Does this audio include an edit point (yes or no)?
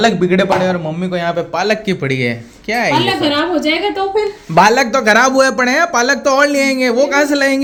no